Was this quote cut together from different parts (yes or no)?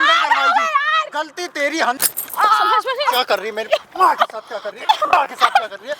yes